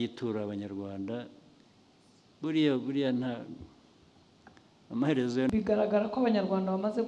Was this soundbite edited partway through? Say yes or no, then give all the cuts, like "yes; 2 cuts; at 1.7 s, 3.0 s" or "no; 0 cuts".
yes; 1 cut; at 5.5 s